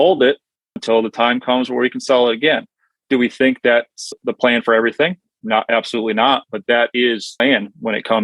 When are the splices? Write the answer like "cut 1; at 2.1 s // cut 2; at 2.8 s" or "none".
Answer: cut 1; at 4.2 s